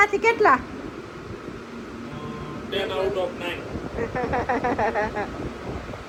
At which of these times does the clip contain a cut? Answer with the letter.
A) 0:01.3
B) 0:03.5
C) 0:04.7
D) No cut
D